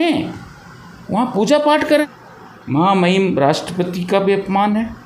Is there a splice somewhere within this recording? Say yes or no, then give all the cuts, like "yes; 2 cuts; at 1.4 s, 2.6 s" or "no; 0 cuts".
yes; 1 cut; at 2.0 s